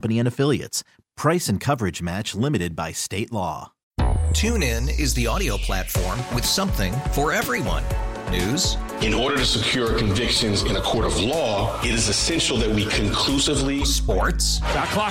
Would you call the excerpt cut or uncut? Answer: cut